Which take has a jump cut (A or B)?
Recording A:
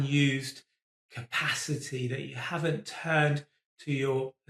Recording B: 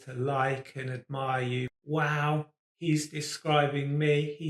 B